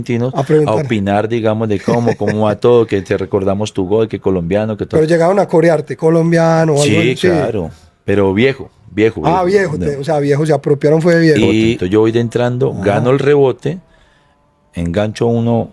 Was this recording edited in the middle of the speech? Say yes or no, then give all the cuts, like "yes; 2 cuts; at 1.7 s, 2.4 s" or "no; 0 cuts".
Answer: yes; 2 cuts; at 4.8 s, 11.8 s